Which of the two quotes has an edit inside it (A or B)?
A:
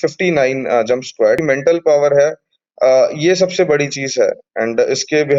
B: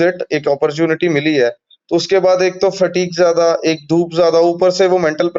A